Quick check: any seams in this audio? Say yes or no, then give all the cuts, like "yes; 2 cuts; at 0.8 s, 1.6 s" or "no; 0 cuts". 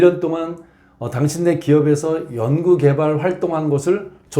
no; 0 cuts